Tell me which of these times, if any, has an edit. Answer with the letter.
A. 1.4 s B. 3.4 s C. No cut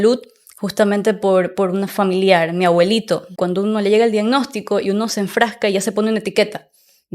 B